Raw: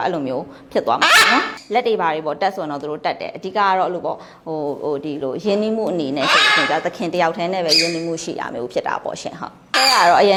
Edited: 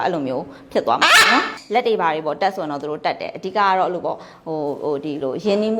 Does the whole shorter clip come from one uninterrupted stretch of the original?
yes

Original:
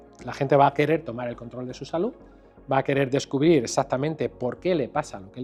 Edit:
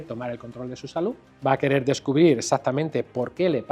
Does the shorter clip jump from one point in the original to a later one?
yes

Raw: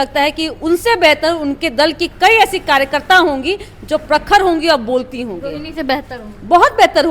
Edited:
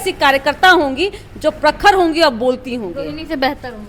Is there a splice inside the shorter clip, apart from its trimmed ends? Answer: no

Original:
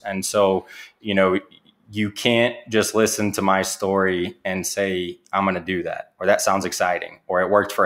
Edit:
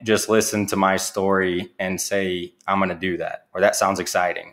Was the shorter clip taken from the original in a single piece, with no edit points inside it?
yes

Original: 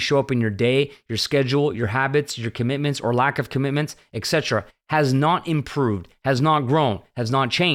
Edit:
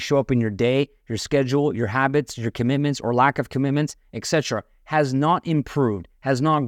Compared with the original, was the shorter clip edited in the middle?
no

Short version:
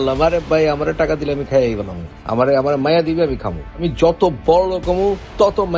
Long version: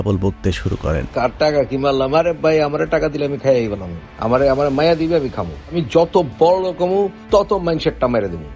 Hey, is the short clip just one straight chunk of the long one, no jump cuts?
yes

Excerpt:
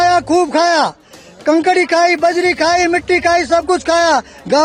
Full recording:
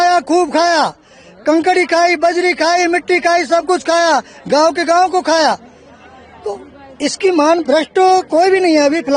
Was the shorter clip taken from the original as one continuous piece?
yes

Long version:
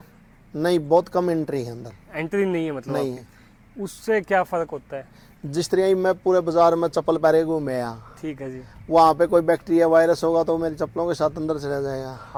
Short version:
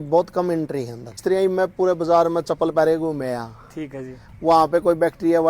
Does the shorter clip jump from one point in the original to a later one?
yes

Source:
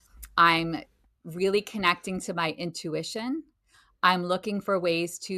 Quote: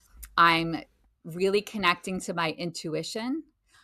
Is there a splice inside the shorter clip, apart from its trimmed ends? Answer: no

